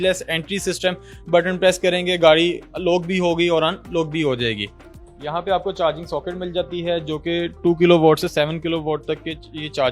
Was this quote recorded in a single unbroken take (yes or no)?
yes